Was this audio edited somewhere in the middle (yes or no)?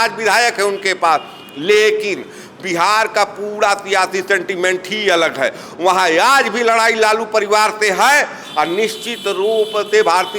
no